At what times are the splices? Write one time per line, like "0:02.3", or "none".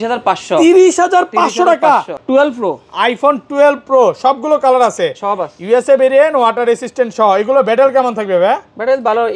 0:02.2